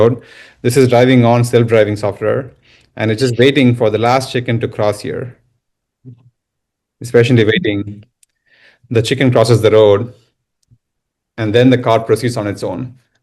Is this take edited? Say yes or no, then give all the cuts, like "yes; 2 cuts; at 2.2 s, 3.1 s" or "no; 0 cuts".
no; 0 cuts